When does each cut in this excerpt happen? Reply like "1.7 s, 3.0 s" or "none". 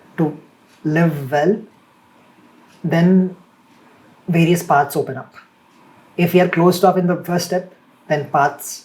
none